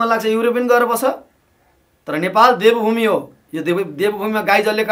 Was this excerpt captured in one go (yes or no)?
yes